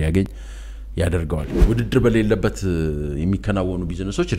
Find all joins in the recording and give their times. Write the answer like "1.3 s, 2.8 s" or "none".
1.5 s